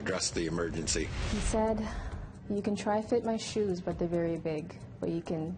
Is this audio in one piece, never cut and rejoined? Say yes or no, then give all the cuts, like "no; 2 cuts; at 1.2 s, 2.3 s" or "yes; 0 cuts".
no; 1 cut; at 1.2 s